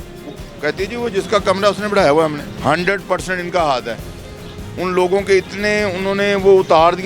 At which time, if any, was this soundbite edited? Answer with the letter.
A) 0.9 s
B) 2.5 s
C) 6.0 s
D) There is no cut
B